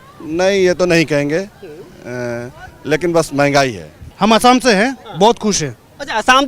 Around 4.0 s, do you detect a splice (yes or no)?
yes